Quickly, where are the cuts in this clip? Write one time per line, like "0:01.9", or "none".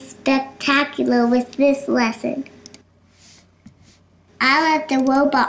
none